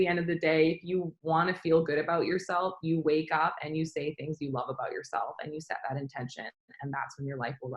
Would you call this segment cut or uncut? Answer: uncut